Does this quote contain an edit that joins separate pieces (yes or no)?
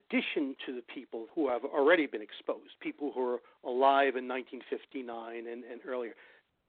yes